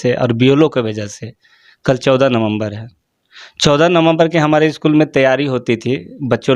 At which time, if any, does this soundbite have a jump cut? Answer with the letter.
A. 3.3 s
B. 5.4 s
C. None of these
C